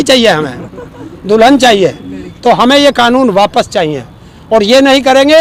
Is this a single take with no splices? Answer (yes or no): yes